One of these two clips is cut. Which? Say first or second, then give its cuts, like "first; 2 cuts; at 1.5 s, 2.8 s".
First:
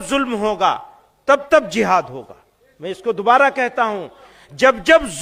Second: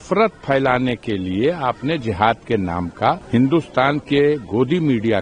second; 1 cut; at 3.2 s